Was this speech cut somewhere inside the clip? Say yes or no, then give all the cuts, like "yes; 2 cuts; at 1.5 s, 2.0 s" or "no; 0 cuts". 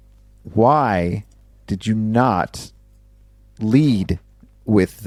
no; 0 cuts